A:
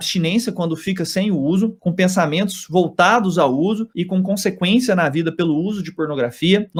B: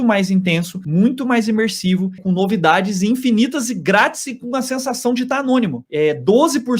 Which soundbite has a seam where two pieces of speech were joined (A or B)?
B